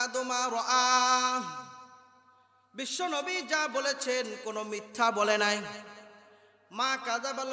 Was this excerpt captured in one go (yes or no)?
yes